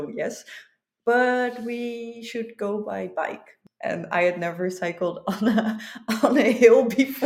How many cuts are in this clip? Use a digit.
1